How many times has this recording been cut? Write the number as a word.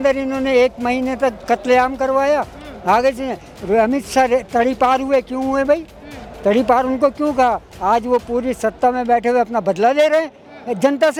zero